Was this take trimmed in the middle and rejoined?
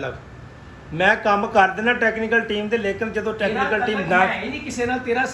no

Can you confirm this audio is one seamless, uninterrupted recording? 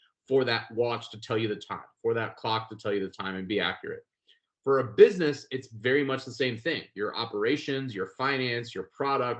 yes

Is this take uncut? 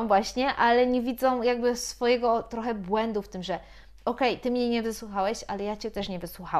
yes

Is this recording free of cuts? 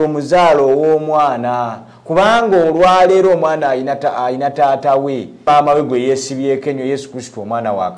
no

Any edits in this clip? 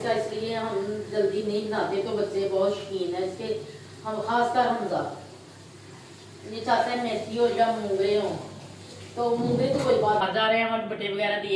yes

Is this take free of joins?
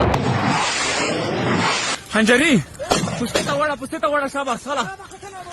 yes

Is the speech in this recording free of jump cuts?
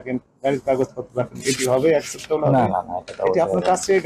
yes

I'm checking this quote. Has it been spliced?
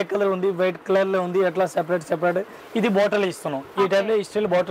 yes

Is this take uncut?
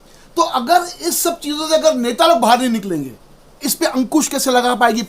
no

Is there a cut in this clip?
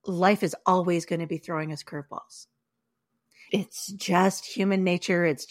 yes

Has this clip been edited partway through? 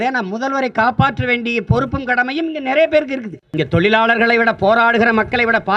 yes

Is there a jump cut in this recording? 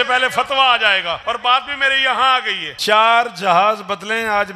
yes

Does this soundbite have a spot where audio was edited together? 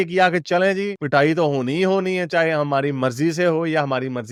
no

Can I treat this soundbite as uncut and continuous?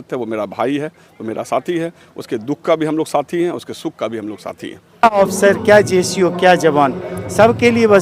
no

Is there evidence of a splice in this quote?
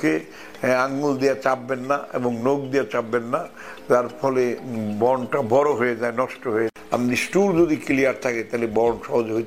yes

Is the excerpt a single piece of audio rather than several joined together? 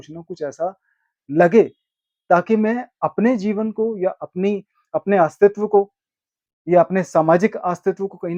yes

